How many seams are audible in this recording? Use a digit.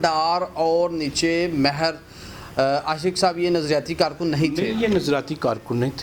0